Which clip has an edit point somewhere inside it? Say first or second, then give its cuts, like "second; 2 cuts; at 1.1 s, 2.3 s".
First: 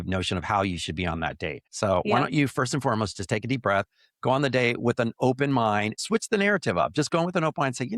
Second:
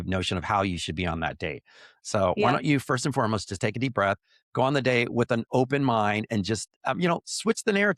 first; 2 cuts; at 1.6 s, 5.9 s